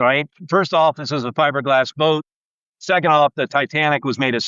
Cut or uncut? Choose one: uncut